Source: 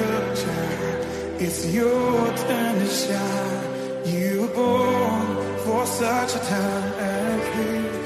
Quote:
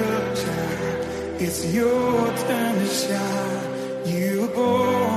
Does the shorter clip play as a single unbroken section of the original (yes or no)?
yes